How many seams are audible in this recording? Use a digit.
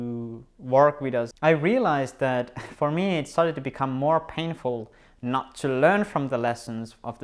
1